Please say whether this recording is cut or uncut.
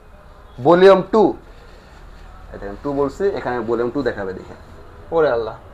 uncut